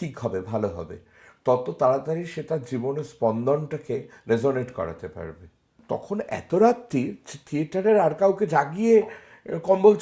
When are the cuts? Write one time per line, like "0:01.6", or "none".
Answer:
0:05.7